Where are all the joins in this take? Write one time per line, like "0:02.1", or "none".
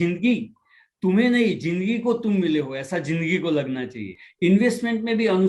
0:04.2